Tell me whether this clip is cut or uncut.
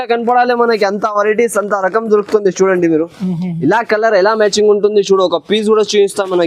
uncut